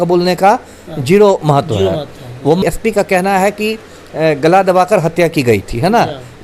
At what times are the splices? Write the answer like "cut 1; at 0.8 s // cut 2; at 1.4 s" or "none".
cut 1; at 2.6 s